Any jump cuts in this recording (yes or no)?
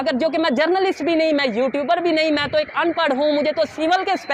no